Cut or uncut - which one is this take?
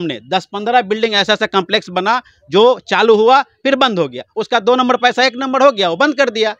uncut